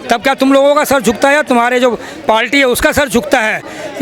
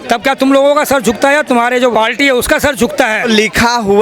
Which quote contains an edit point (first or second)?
second